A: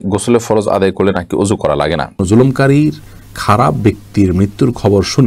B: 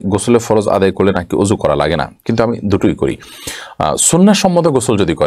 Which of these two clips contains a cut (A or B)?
A